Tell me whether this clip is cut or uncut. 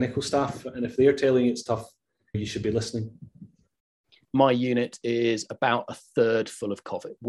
cut